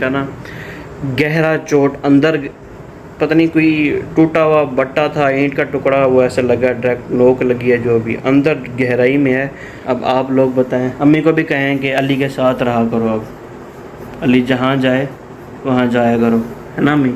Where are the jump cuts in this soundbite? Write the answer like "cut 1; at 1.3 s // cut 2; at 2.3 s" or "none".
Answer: cut 1; at 9.7 s